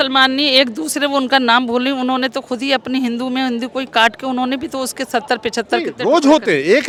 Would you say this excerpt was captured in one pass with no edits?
yes; 0 cuts

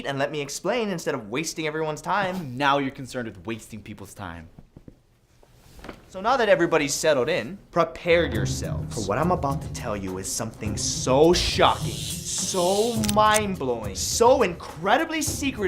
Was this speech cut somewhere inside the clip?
yes; 1 cut; at 4.8 s

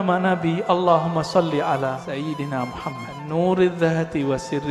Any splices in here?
yes; 2 cuts; at 2.0 s, 3.2 s

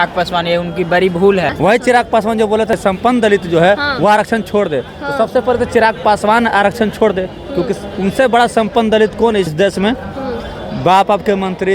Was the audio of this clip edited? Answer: yes; 3 cuts; at 1.5 s, 2.8 s, 9.5 s

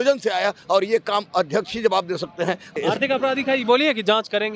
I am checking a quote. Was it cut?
yes; 1 cut; at 2.7 s

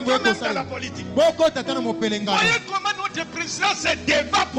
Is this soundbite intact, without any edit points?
yes; 0 cuts

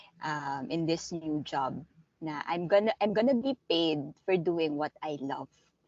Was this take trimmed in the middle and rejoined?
no; 0 cuts

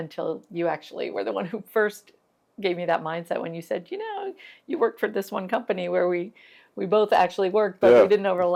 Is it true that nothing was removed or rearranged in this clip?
yes; 0 cuts

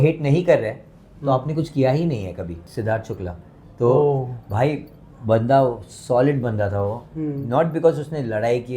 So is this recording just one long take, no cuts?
no; 1 cut; at 2.7 s

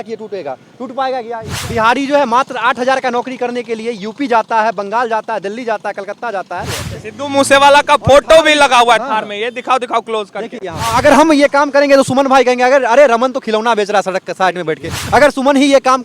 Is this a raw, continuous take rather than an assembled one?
no; 3 cuts; at 1.5 s, 6.9 s, 10.9 s

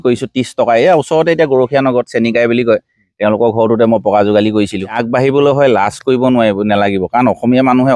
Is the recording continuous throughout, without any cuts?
no; 1 cut; at 5.0 s

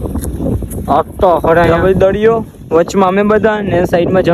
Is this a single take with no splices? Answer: no; 1 cut; at 1.7 s

